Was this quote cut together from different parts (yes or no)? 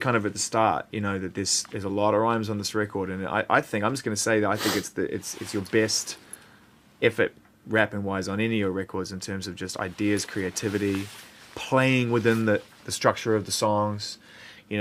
no